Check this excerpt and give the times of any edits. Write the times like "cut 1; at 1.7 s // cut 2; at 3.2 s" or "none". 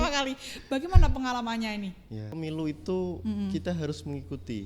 cut 1; at 2.3 s